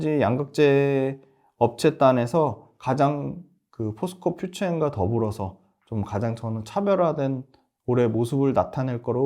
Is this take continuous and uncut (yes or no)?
yes